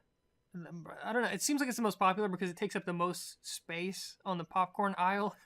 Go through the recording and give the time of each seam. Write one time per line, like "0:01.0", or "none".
0:02.2